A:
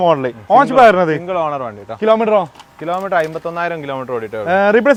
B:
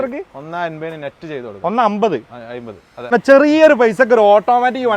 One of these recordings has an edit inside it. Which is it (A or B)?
B